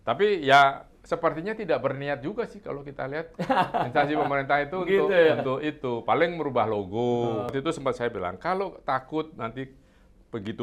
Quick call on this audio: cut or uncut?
cut